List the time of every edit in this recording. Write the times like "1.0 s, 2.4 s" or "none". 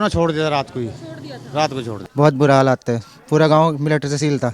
2.0 s